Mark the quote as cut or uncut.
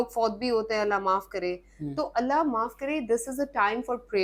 uncut